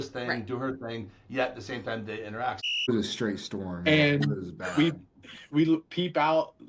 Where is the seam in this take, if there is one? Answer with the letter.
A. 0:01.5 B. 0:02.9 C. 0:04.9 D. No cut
B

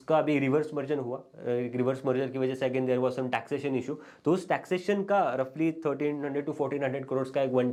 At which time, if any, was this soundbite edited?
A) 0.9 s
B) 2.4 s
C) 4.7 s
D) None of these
D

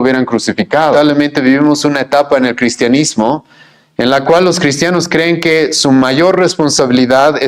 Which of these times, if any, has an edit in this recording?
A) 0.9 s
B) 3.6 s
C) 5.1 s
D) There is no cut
A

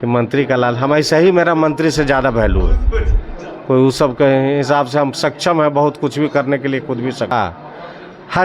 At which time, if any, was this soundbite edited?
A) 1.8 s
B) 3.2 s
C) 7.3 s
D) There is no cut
C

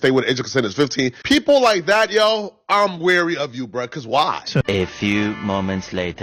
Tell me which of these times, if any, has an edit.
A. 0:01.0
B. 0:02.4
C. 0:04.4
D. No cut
D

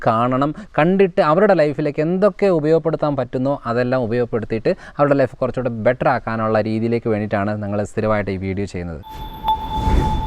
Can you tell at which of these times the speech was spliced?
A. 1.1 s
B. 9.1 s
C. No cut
B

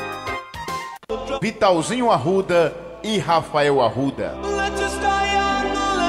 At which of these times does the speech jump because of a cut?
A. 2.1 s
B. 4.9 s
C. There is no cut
B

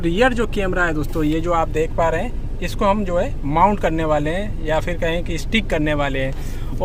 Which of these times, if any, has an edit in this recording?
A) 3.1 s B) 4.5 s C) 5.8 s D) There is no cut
D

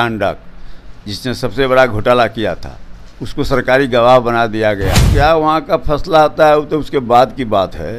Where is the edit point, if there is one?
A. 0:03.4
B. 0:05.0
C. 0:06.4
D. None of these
B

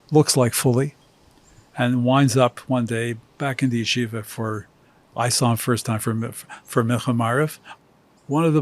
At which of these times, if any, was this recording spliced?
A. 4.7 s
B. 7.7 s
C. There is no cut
B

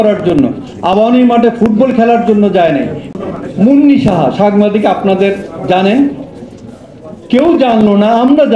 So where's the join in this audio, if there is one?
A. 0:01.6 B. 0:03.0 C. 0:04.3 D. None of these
B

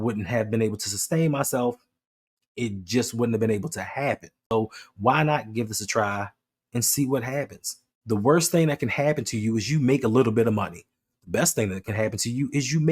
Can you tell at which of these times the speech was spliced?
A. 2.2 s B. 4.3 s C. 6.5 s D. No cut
B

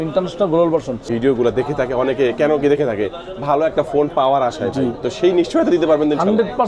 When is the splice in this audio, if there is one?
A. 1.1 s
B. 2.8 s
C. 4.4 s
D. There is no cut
A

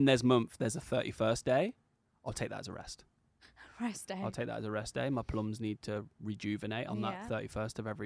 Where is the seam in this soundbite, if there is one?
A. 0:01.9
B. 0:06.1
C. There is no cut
C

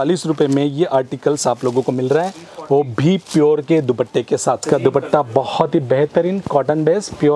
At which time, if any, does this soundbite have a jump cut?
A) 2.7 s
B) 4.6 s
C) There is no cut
B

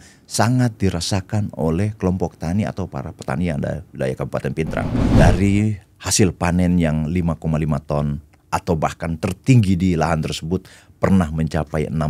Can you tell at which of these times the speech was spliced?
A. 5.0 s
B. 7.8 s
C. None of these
A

